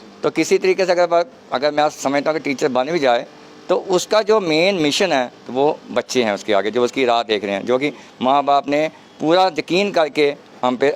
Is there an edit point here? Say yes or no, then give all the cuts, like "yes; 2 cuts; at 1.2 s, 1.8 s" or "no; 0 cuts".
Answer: no; 0 cuts